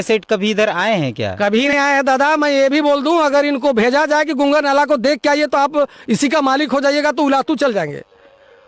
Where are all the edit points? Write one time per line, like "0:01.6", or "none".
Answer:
0:01.7